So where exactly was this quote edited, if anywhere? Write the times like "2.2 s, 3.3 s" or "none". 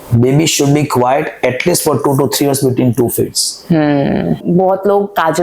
4.4 s